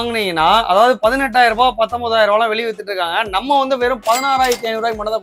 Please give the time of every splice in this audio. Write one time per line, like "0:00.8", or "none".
none